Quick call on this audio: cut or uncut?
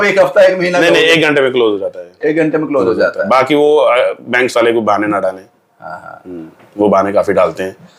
uncut